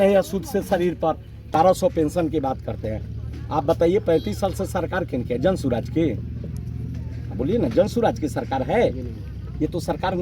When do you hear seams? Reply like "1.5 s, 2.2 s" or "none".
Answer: 1.5 s

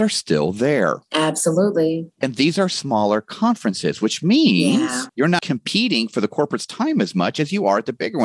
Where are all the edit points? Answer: 5.4 s

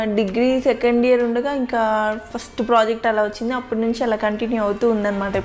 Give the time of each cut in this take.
none

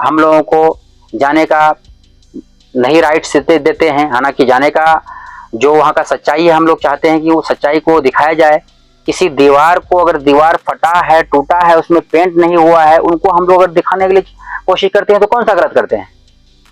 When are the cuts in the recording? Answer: none

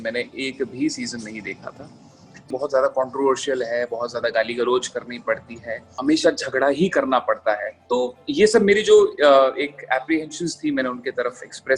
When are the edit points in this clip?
2.5 s, 5.9 s, 7.7 s

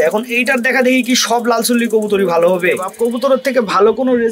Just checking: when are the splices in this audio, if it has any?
2.9 s

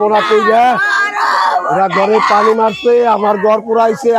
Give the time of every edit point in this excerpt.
none

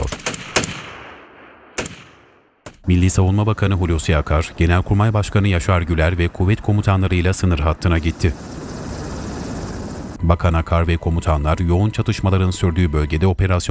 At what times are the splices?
none

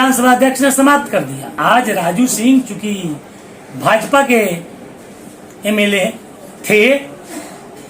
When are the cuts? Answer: 1.6 s

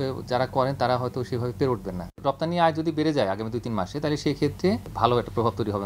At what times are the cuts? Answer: 2.1 s, 4.9 s

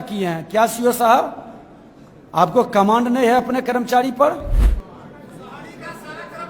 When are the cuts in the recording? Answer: 4.6 s

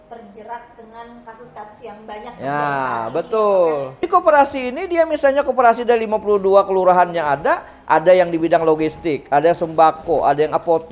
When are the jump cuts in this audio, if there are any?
4.0 s

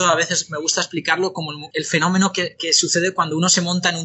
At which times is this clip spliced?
1.6 s

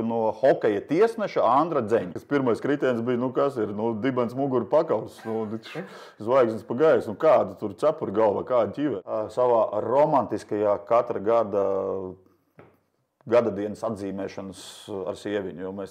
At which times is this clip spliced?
2.2 s, 9.0 s

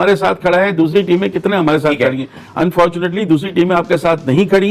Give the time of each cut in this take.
none

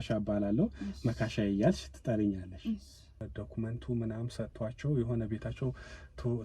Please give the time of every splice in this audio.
3.2 s

